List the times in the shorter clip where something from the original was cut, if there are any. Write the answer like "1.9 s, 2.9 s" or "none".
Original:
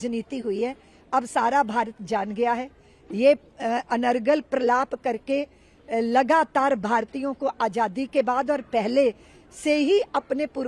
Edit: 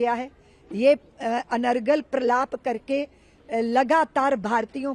none